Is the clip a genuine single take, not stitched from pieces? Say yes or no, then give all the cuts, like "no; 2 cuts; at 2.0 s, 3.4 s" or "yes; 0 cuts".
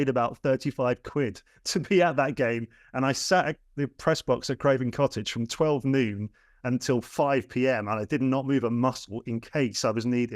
yes; 0 cuts